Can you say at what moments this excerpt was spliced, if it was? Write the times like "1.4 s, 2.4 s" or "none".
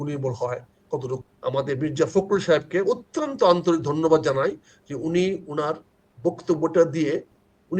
1.2 s